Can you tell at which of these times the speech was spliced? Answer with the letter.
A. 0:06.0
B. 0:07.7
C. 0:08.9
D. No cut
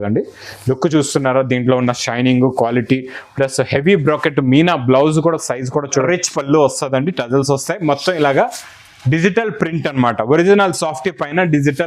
A